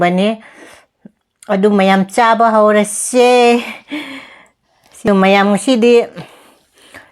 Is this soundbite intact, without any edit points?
no; 1 cut; at 5.1 s

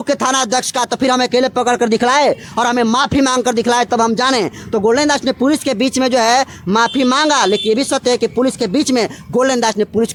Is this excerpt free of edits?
yes; 0 cuts

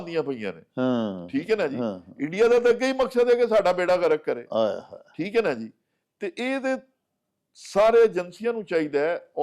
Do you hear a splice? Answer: no; 0 cuts

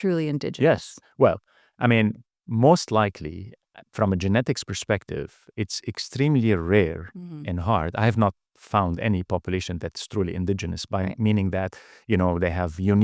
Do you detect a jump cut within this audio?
no; 0 cuts

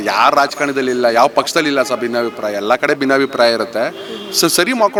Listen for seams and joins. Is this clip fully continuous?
yes; 0 cuts

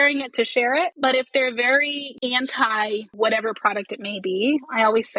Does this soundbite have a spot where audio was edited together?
yes; 3 cuts; at 0.9 s, 2.0 s, 3.1 s

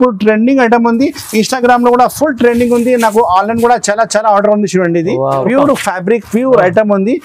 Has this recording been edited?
yes; 1 cut; at 5.4 s

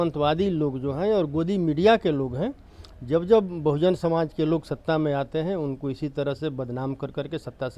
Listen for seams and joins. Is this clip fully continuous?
yes; 0 cuts

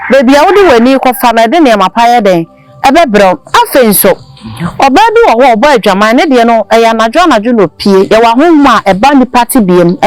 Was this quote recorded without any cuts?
yes; 0 cuts

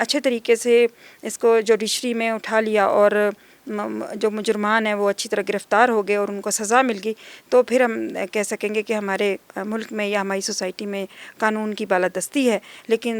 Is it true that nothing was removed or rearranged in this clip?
yes; 0 cuts

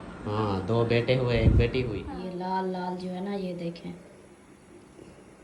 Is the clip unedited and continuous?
no; 1 cut; at 2.1 s

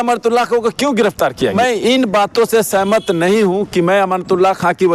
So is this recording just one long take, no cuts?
no; 1 cut; at 1.5 s

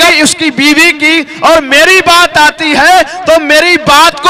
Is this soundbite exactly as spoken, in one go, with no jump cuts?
yes; 0 cuts

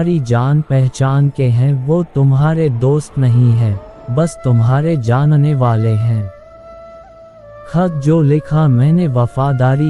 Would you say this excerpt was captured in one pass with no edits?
no; 2 cuts; at 6.4 s, 7.7 s

